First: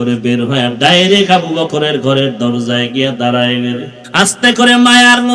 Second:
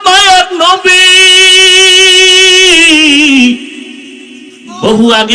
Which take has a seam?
first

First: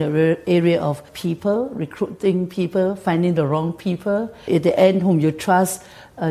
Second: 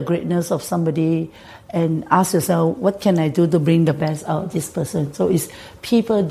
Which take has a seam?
first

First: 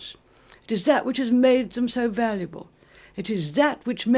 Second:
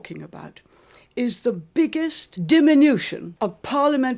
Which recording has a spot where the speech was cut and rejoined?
second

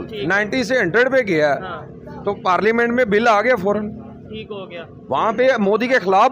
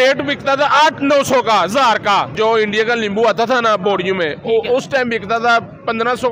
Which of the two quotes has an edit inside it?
second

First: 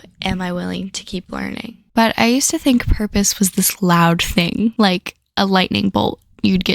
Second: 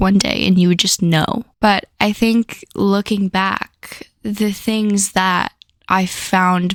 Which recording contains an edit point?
first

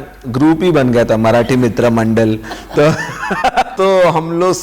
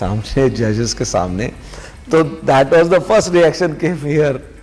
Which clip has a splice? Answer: first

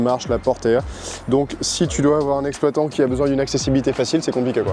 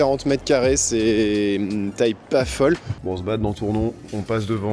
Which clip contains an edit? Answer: second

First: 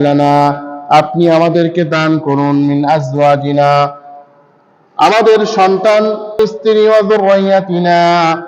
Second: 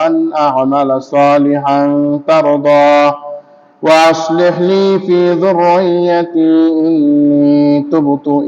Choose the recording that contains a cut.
first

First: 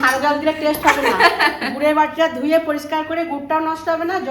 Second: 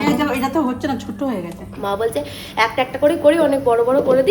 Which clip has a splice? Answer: second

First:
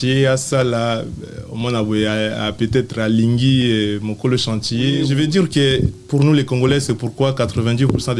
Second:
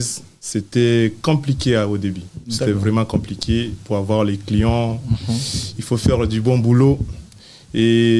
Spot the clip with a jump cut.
first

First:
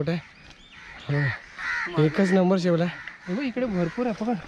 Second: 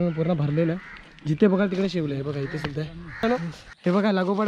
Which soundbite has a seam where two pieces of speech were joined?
second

